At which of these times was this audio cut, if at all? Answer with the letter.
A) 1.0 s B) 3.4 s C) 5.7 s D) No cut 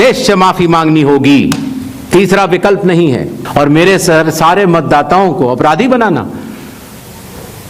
B